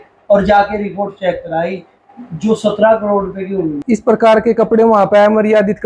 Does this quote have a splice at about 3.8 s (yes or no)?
yes